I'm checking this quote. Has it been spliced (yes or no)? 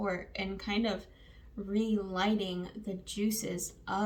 no